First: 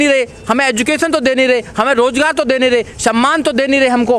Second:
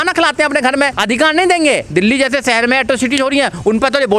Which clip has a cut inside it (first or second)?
second